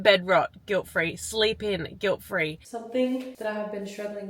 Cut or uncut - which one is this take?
cut